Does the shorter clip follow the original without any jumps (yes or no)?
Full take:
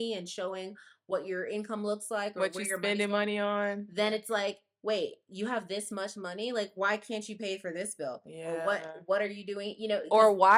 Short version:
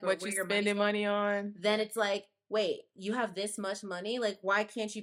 yes